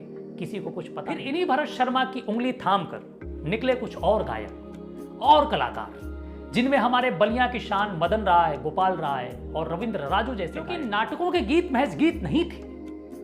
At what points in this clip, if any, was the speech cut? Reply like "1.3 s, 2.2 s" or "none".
1.2 s, 10.8 s